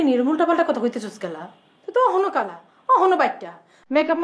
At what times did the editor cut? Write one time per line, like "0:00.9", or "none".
none